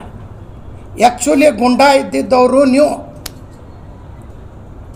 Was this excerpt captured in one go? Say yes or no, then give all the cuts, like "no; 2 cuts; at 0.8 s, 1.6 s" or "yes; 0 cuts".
yes; 0 cuts